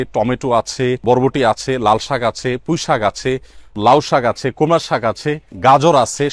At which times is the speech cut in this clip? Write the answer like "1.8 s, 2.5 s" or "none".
1.0 s, 3.8 s

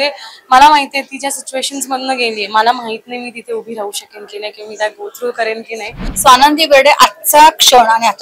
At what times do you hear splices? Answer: 6.1 s

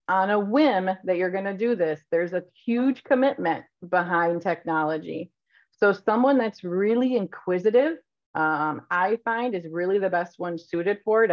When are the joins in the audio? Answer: none

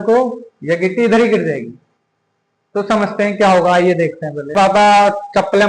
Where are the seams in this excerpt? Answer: 4.5 s

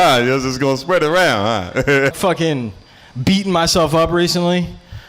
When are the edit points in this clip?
2.1 s

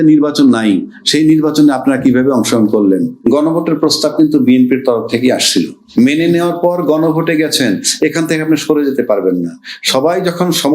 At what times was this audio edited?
3.2 s, 5.8 s

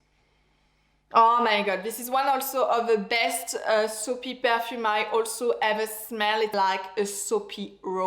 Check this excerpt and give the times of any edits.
6.5 s

